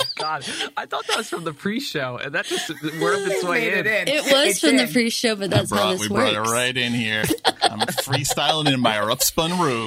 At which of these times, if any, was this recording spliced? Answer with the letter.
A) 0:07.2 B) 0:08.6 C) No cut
A